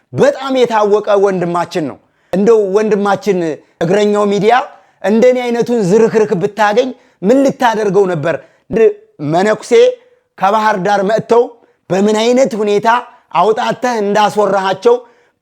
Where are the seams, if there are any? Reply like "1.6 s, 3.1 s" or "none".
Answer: 8.7 s